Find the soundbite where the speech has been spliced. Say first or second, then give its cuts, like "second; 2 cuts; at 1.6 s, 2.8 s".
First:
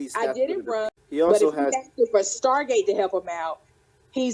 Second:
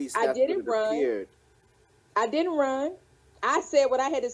first; 1 cut; at 0.9 s